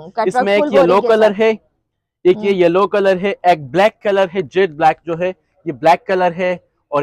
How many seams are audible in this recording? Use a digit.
0